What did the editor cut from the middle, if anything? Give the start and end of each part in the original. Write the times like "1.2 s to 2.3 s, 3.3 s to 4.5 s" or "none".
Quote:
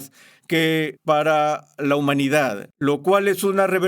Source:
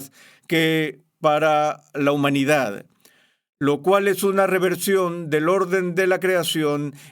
0.9 s to 1.1 s, 2.8 s to 3.5 s